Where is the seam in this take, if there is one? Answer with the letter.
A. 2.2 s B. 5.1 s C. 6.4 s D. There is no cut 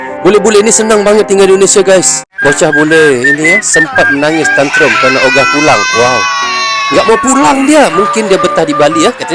A